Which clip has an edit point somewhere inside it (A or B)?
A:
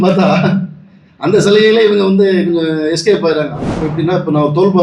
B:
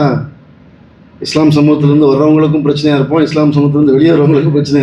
A